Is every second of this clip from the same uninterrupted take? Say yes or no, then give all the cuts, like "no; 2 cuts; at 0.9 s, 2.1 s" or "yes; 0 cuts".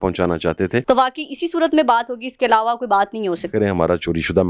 no; 2 cuts; at 0.8 s, 3.5 s